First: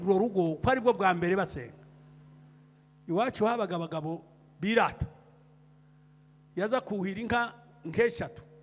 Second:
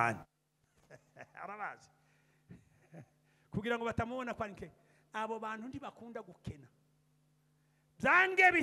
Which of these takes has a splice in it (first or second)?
first